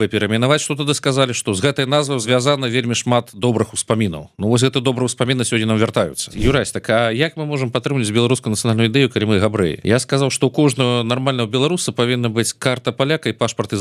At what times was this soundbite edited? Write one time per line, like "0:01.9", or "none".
0:02.2
0:06.2
0:09.8